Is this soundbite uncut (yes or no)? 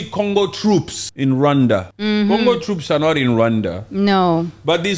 no